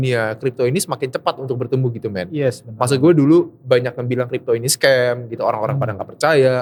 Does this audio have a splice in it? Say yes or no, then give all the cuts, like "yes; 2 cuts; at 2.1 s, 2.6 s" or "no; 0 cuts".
no; 0 cuts